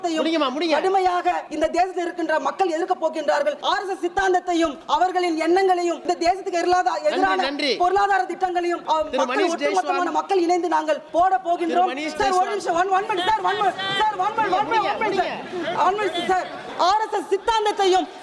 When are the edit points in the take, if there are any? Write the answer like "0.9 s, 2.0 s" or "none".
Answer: 1.5 s, 3.6 s, 4.8 s, 6.0 s, 8.8 s, 11.0 s, 16.6 s